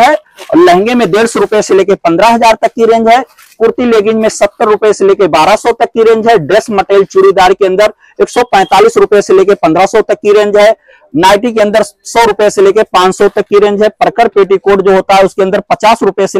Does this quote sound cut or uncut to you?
uncut